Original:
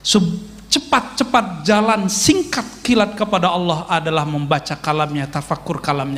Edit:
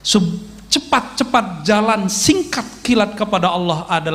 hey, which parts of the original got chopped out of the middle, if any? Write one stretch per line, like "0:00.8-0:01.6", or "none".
none